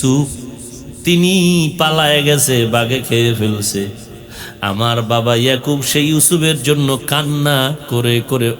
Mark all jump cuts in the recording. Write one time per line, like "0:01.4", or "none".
none